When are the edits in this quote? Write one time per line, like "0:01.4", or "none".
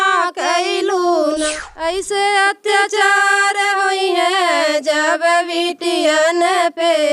0:01.5